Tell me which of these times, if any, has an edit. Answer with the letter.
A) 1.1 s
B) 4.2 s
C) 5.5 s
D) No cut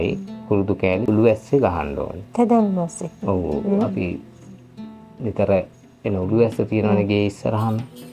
A